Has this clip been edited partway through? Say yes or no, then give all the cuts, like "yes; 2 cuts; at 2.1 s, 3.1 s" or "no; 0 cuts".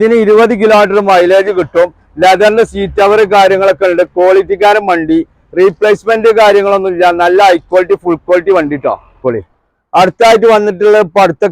yes; 1 cut; at 9.2 s